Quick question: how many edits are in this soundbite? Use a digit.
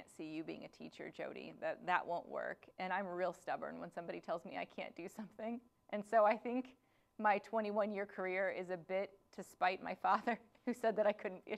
0